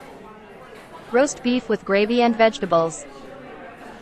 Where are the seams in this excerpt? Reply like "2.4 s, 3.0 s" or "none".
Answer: 2.9 s